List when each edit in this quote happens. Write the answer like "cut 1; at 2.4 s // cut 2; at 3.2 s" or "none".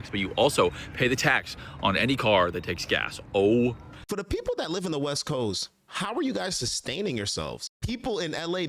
cut 1; at 4.0 s // cut 2; at 7.7 s